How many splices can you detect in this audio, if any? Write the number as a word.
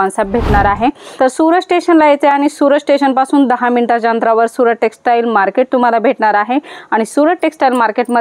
one